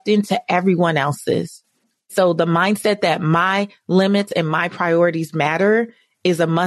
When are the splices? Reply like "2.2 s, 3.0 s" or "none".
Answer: 2.1 s